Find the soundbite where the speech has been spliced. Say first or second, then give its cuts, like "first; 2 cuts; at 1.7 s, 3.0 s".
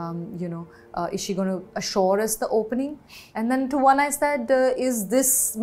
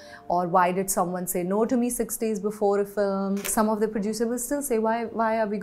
second; 1 cut; at 3.5 s